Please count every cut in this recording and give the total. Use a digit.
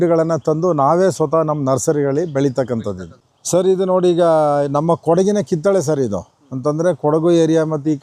1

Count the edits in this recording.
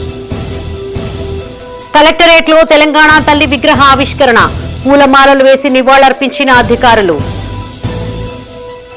1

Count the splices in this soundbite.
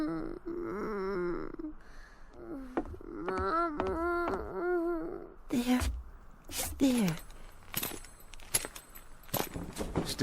1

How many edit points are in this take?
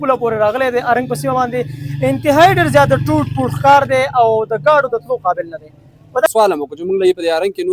1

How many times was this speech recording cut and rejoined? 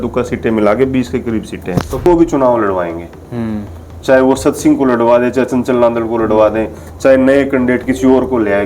1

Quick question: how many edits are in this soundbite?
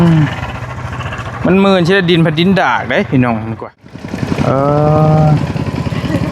1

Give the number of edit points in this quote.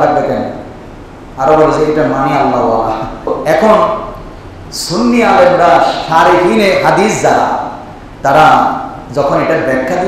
1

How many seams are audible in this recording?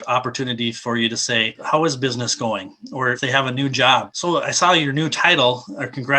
3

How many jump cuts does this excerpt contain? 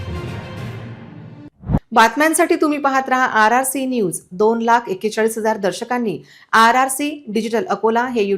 0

